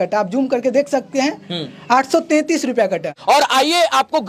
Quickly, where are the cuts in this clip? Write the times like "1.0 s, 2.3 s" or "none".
3.1 s